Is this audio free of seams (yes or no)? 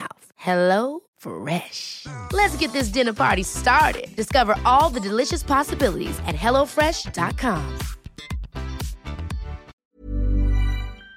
no